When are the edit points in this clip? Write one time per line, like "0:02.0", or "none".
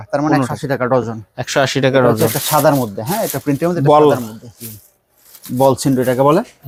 none